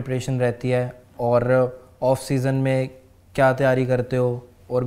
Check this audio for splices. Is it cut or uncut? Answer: uncut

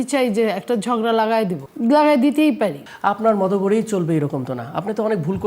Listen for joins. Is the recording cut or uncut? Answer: cut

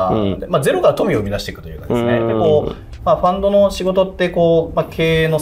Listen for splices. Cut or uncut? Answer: uncut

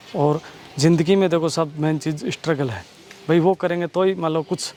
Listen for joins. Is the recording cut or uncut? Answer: uncut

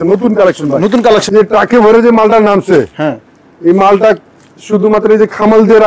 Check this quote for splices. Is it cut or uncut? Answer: cut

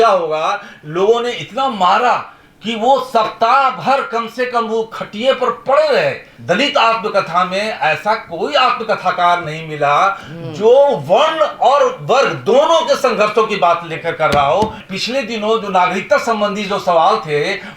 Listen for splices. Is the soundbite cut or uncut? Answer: cut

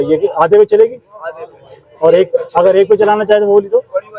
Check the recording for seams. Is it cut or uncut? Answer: uncut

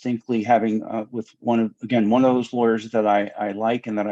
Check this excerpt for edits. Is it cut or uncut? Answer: uncut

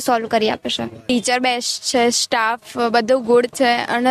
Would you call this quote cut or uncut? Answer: cut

